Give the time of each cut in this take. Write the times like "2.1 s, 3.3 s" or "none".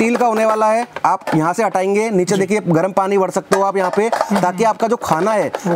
none